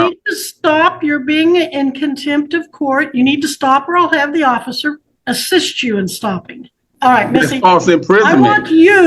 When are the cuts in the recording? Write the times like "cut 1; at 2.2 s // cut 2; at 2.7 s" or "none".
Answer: cut 1; at 5.1 s // cut 2; at 6.8 s